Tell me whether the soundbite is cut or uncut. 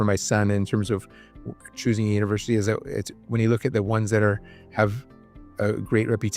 uncut